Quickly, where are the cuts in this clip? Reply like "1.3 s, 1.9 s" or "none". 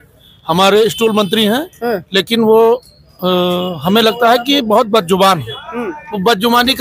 none